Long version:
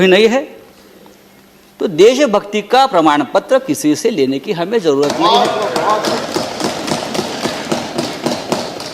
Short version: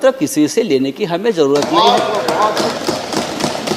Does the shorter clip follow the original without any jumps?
yes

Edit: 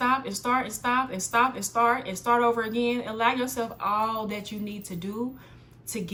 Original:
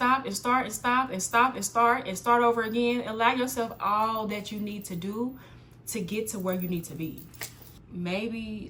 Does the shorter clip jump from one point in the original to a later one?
no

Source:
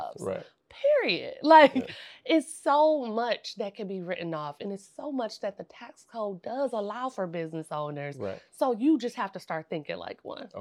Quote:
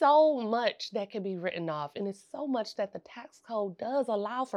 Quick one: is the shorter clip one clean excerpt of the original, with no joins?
yes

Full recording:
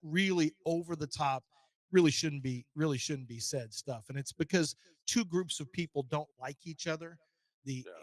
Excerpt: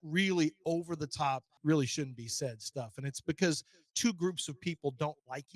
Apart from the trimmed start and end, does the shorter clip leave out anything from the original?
yes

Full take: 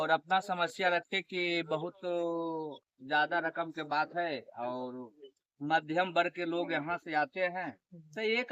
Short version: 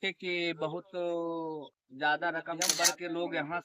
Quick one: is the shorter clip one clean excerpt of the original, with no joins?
no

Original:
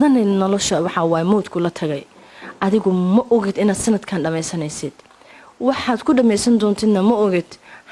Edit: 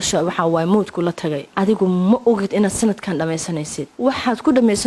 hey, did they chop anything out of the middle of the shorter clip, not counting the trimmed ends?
yes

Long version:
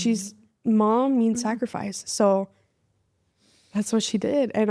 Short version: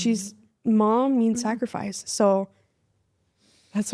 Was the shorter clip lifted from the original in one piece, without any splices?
yes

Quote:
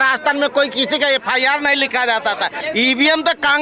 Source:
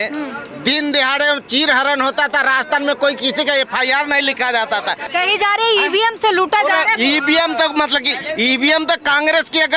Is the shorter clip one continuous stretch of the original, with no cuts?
no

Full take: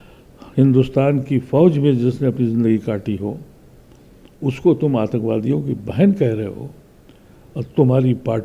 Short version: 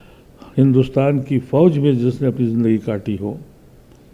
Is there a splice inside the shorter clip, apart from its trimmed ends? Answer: no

